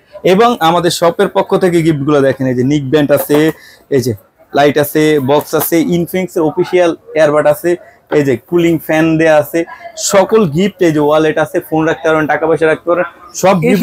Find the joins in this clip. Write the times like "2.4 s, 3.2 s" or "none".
none